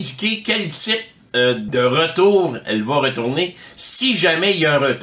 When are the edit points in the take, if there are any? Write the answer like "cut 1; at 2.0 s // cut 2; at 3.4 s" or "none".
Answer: cut 1; at 1.7 s